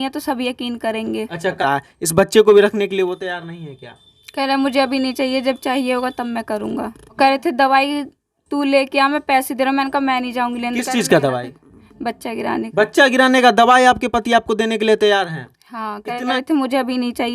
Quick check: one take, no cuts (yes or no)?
no